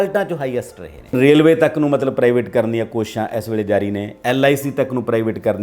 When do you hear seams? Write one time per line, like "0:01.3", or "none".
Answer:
0:01.1